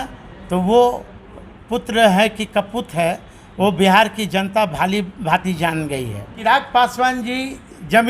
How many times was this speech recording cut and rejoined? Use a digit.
1